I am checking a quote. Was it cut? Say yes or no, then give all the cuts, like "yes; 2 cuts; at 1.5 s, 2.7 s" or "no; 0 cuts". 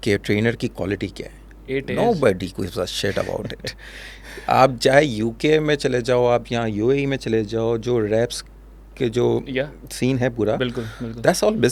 no; 0 cuts